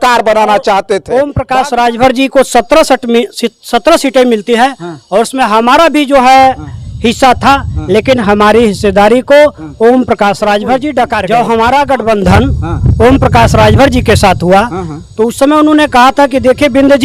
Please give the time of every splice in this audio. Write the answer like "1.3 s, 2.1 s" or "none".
1.0 s, 11.2 s